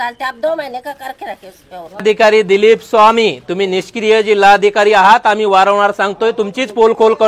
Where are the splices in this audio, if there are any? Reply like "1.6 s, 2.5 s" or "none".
2.0 s